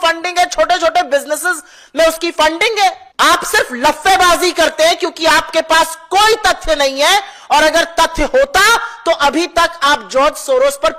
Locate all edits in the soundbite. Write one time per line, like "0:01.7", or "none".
0:03.0